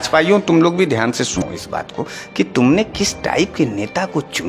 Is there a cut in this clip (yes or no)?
yes